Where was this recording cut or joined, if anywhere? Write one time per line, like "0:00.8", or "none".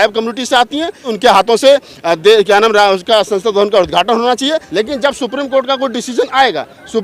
0:01.1
0:04.7